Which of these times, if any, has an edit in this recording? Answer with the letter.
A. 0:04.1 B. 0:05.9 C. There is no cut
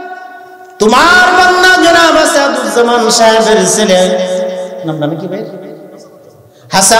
C